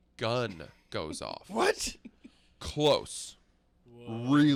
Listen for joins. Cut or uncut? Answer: uncut